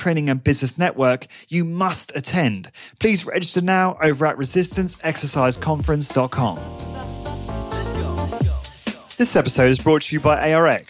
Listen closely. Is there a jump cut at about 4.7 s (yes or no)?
no